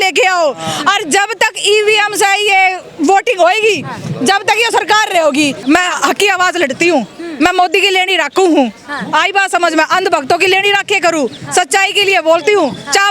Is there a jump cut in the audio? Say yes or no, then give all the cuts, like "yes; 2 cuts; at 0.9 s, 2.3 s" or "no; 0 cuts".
yes; 1 cut; at 5.6 s